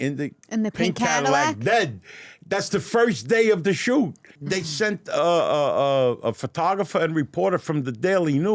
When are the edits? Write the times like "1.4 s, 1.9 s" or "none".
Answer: 4.2 s